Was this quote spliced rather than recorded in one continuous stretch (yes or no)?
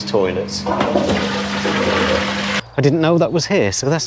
yes